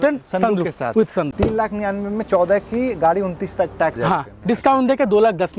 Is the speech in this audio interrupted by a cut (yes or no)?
yes